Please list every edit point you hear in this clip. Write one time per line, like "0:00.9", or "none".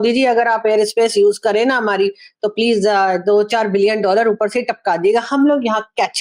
none